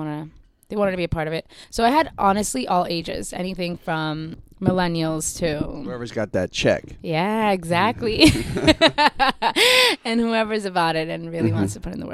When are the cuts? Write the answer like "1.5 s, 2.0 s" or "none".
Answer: 1.6 s, 4.4 s